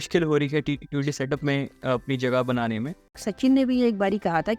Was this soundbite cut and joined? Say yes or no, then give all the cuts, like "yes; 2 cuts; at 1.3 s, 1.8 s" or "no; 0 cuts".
yes; 1 cut; at 3.1 s